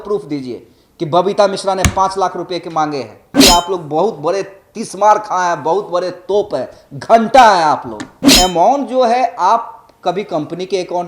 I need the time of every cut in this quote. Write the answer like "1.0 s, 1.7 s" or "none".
3.4 s, 8.2 s